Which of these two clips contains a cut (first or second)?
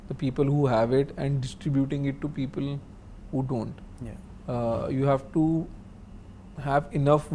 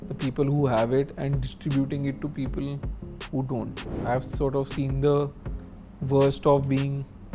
second